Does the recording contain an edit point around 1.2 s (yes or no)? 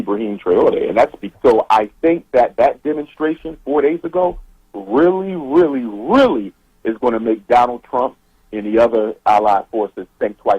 yes